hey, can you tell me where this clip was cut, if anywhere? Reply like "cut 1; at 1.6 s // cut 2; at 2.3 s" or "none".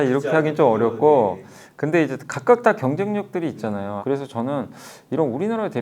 cut 1; at 3.9 s